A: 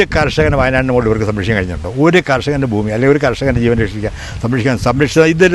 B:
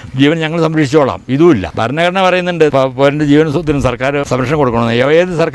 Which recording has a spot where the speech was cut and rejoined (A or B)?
B